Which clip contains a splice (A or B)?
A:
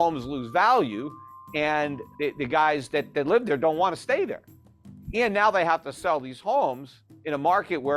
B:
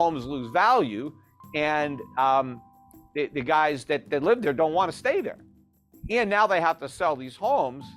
A